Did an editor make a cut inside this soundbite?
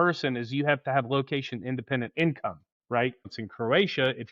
yes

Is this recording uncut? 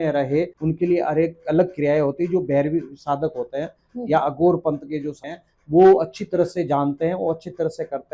yes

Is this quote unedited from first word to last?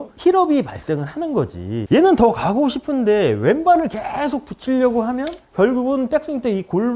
no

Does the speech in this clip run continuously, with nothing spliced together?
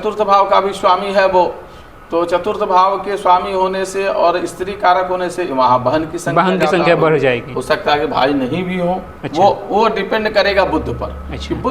no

